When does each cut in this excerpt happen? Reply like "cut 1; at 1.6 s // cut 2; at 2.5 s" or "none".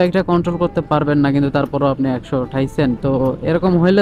none